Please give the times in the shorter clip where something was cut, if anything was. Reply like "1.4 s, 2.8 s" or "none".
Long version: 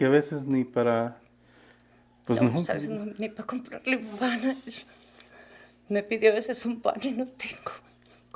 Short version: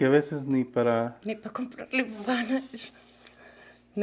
1.3 s